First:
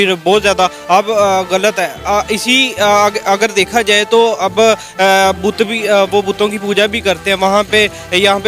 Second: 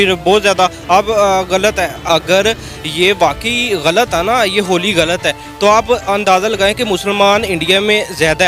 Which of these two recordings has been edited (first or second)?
second